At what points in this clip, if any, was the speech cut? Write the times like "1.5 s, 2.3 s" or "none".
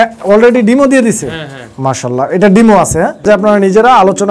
3.2 s

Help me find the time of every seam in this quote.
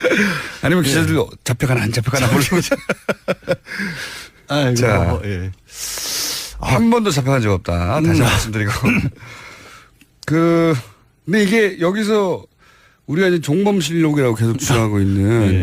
none

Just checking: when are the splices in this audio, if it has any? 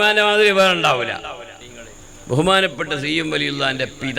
1.6 s

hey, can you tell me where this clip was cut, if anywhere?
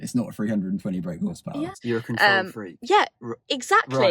1.8 s

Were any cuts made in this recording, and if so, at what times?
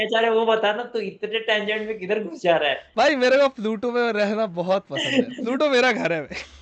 2.8 s

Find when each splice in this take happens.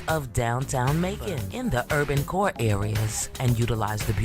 1.4 s

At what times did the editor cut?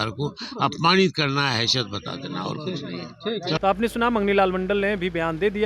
none

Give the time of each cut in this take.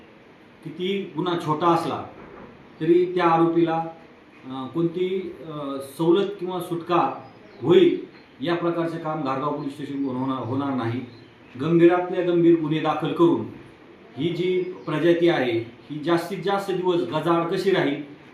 none

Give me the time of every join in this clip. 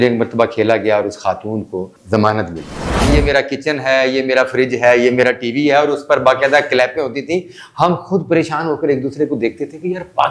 1.9 s, 3.1 s

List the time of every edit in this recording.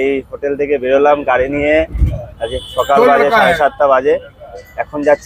none

